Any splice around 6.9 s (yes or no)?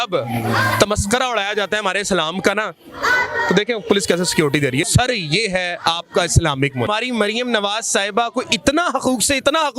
yes